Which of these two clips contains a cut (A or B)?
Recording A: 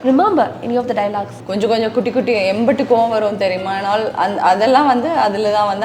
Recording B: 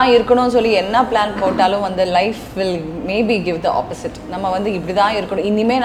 A